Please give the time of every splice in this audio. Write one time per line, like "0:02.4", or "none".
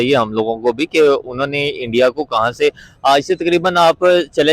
none